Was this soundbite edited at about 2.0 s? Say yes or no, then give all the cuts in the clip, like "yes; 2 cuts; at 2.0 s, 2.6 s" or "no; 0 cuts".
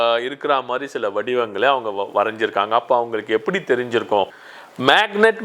no; 1 cut; at 4.3 s